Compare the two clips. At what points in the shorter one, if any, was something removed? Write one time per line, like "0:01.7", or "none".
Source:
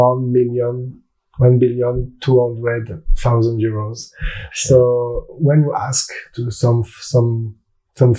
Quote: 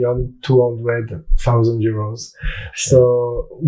none